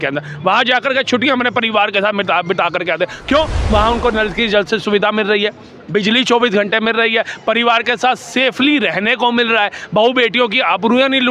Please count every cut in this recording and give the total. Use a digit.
0